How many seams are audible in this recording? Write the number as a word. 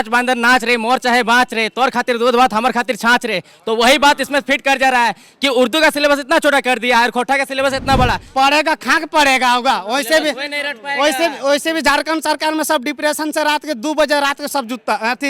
one